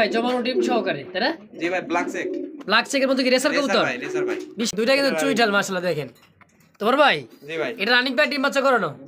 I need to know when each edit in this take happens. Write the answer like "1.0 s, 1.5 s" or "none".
4.7 s